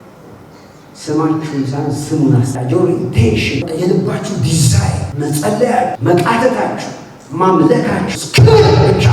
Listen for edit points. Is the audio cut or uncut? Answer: cut